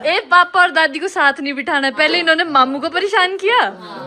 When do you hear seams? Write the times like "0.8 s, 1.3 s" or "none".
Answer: none